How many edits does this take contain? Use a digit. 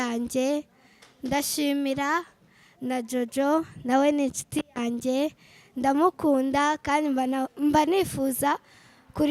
0